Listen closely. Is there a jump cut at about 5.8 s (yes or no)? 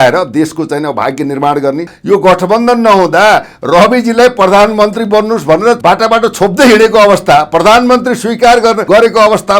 yes